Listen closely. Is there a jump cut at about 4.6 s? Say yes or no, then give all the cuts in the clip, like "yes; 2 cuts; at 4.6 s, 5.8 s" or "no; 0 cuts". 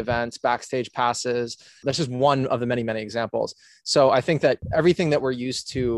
yes; 2 cuts; at 1.8 s, 4.6 s